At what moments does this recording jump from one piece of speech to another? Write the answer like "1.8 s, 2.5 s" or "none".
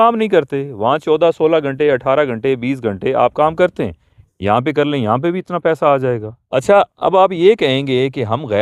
6.3 s